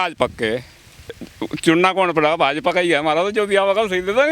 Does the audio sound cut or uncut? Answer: cut